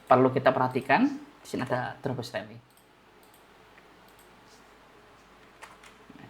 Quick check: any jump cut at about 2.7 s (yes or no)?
yes